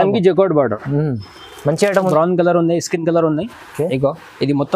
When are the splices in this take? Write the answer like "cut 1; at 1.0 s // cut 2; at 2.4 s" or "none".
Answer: cut 1; at 2.1 s